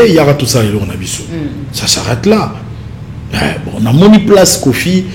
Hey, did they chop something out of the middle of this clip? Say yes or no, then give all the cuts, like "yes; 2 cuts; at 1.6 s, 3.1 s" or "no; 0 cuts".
no; 0 cuts